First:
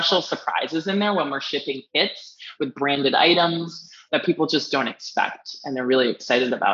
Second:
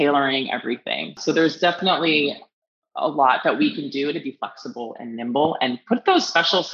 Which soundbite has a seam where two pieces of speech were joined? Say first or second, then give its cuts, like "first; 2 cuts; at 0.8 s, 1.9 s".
second; 1 cut; at 1.2 s